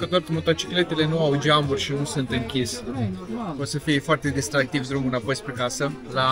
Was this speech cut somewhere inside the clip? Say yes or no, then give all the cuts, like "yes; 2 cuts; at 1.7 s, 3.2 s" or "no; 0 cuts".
no; 0 cuts